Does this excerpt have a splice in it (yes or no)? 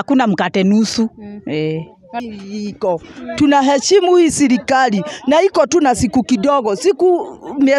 yes